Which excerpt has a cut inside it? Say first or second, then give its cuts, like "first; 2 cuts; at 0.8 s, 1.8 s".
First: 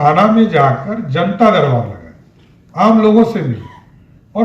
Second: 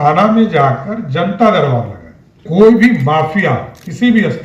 second; 1 cut; at 2.5 s